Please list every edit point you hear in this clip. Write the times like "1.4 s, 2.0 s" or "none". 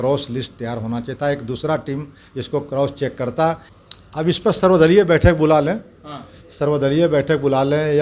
3.7 s